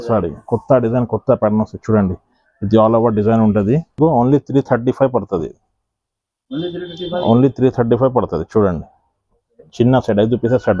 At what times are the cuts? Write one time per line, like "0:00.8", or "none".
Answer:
0:04.0